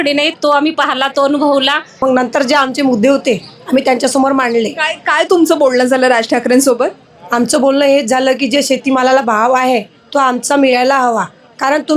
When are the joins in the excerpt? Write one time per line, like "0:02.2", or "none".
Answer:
0:02.0